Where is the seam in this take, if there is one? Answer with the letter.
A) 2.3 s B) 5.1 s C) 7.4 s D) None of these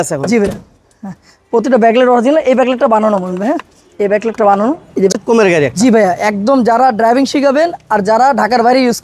B